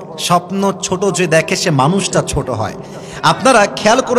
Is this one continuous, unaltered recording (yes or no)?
yes